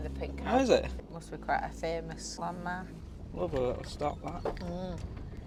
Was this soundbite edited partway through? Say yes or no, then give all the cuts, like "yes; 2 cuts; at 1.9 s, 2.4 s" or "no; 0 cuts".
no; 0 cuts